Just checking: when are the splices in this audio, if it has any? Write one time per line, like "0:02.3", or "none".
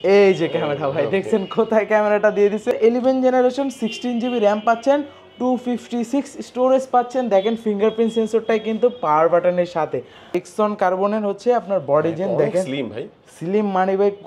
0:02.7
0:10.4